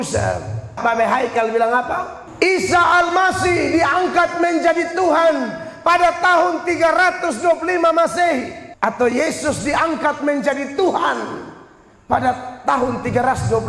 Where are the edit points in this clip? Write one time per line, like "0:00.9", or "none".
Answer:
0:00.8
0:02.2
0:08.6